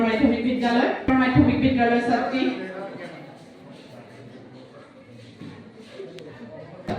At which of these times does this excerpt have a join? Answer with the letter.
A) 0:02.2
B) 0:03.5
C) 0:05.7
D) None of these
D